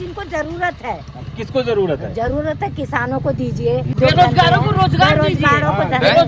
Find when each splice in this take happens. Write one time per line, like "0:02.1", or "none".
0:03.9